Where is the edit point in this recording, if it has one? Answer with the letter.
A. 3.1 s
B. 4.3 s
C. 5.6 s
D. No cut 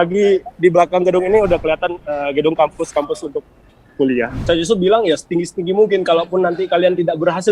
B